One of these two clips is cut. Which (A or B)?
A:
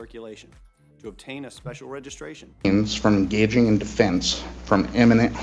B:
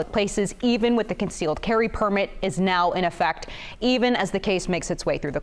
A